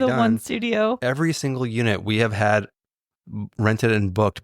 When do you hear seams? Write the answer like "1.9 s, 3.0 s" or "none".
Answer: 1.0 s